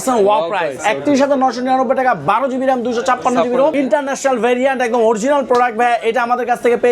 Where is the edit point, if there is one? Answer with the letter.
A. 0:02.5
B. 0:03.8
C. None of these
B